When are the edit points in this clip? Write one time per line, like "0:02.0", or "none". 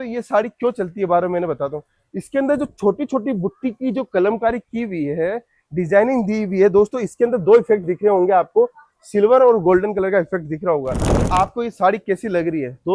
0:11.1